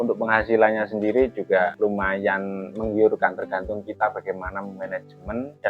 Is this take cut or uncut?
uncut